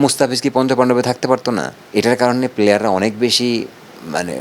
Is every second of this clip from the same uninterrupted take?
no; 1 cut; at 1.7 s

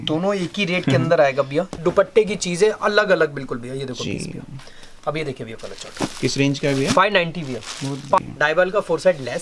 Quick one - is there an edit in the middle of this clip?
yes; 2 cuts; at 1.7 s, 8.2 s

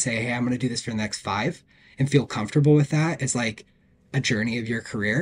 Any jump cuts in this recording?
no; 0 cuts

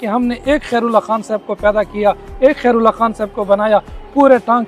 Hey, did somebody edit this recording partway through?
no; 0 cuts

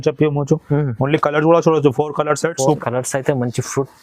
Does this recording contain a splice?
yes; 1 cut; at 2.8 s

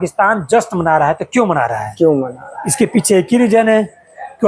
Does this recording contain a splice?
no; 0 cuts

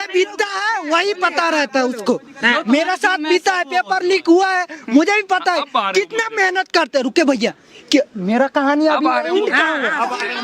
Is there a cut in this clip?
no; 0 cuts

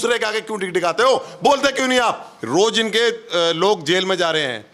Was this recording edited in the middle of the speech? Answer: yes; 1 cut; at 2.3 s

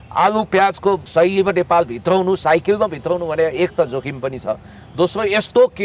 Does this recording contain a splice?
yes; 1 cut; at 1.1 s

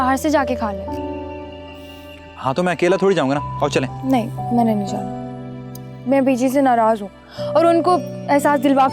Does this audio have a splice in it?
no; 0 cuts

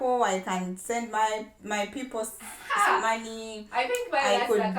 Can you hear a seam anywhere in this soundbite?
no; 0 cuts

